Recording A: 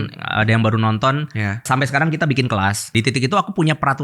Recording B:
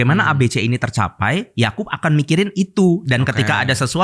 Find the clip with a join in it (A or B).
A